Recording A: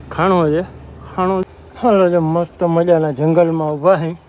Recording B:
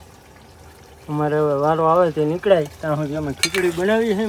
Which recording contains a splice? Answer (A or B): A